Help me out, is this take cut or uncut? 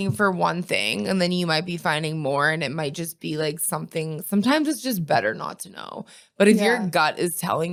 uncut